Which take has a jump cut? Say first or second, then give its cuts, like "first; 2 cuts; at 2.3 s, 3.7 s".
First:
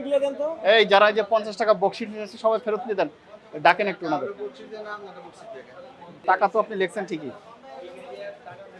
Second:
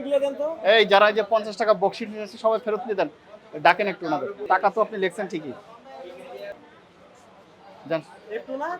second; 2 cuts; at 4.4 s, 6.6 s